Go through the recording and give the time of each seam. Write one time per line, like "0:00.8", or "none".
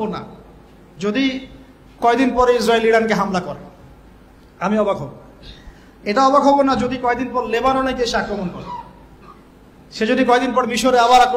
none